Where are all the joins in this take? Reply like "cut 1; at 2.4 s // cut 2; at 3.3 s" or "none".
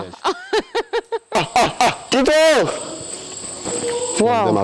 cut 1; at 1.3 s // cut 2; at 2.0 s // cut 3; at 3.5 s